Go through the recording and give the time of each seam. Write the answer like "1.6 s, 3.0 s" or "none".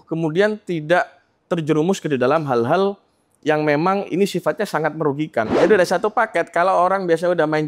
5.5 s